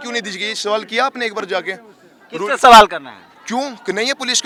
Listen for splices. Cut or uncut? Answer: uncut